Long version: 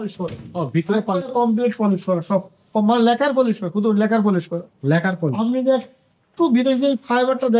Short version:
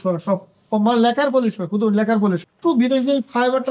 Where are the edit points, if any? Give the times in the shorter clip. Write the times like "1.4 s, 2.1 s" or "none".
2.5 s

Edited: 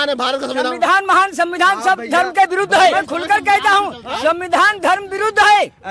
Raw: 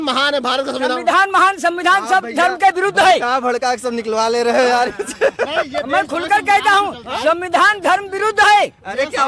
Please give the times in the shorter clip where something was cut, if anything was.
2.9 s

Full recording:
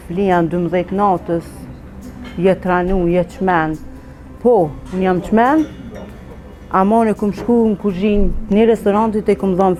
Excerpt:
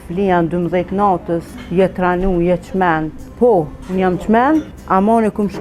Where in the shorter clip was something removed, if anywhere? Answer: 1.6 s, 3.2 s, 4.8 s

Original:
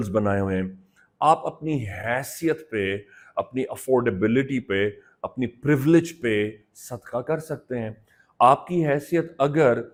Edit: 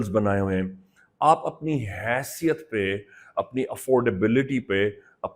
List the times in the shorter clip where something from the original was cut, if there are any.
none

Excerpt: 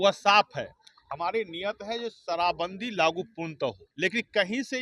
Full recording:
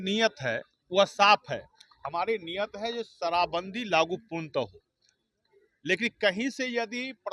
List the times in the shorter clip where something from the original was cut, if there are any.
3.9 s

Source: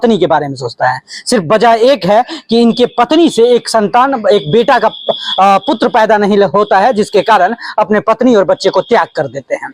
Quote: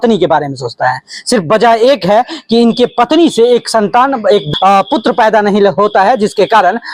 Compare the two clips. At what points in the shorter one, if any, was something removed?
4.5 s

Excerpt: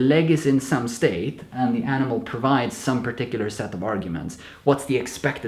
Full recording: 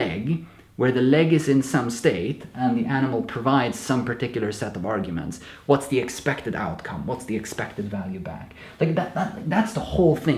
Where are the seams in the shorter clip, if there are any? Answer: none

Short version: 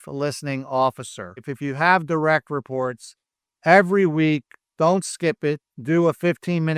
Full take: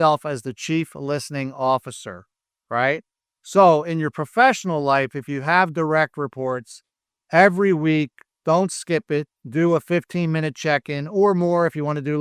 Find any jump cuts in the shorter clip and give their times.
1.5 s

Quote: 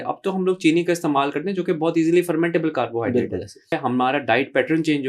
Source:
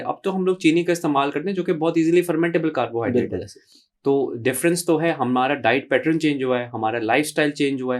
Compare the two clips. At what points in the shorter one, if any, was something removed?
3.8 s

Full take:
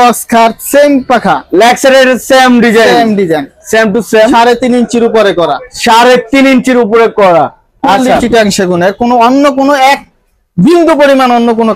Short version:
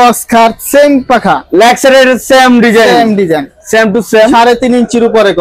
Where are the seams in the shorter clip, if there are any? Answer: none

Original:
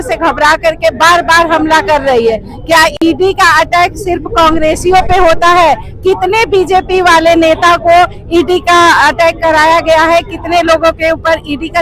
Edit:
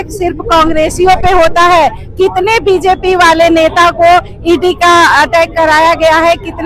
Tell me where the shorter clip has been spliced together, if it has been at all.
none

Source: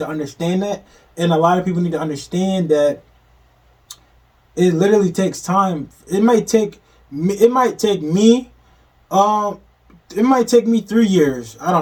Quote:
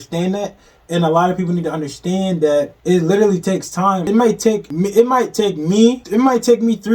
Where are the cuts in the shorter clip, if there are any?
2.7 s, 4.3 s, 6.0 s

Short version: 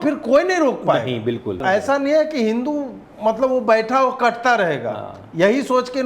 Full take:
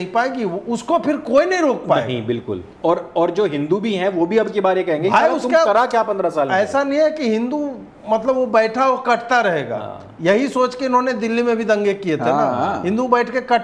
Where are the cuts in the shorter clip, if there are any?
1.6 s

